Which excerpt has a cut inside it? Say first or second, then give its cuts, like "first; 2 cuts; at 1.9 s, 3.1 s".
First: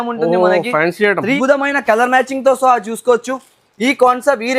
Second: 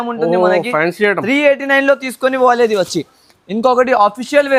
first; 1 cut; at 1.4 s